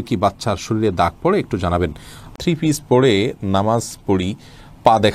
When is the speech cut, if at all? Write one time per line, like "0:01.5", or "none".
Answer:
0:02.3